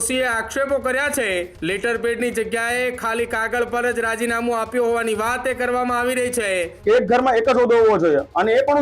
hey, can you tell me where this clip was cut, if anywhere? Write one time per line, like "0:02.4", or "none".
0:01.5
0:06.7